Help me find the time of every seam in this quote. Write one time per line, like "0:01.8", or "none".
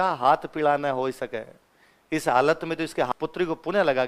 0:03.1

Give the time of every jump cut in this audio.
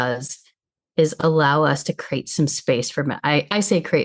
none

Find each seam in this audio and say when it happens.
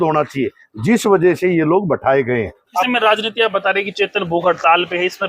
0:02.9

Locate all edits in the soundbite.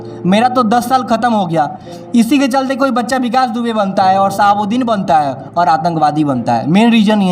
none

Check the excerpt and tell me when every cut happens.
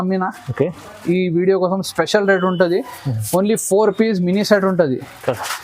none

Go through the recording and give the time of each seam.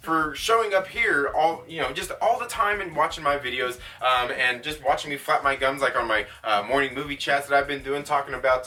none

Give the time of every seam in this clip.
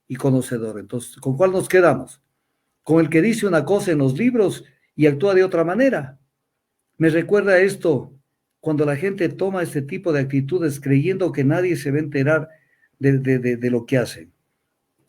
none

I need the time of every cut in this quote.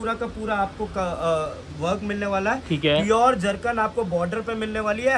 none

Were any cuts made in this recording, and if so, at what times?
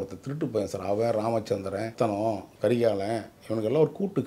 0:01.9

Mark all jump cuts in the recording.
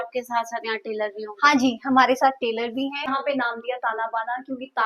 0:03.1

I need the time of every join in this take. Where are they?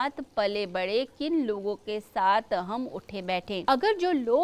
0:03.5

